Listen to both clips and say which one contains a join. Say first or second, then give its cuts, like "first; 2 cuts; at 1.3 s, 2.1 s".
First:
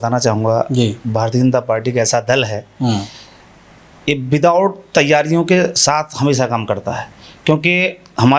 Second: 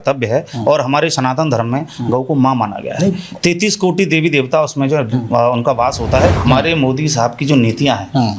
second; 1 cut; at 6.4 s